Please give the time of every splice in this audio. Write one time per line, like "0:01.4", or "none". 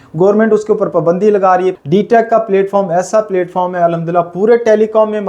0:01.8